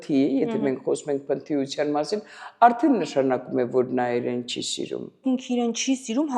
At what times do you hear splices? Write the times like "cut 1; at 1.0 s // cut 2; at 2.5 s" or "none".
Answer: cut 1; at 5.2 s